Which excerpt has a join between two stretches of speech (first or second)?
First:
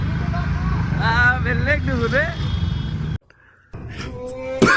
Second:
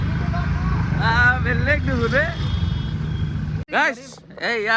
second